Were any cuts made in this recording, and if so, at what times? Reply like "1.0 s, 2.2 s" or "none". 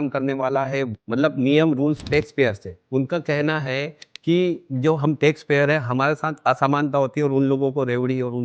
1.0 s, 2.8 s